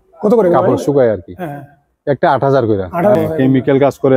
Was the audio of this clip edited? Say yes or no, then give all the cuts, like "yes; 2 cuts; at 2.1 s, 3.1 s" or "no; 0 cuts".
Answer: yes; 1 cut; at 3.2 s